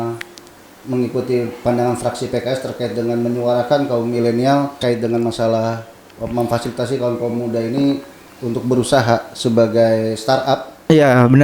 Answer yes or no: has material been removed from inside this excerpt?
yes